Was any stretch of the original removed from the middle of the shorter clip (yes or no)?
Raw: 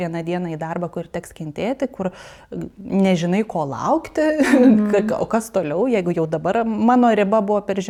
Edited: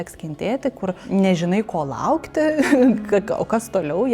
yes